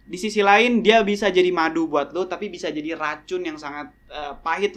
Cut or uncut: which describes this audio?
uncut